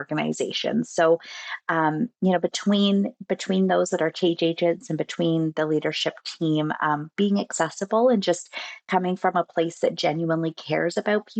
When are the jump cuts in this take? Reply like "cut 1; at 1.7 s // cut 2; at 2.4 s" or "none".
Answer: none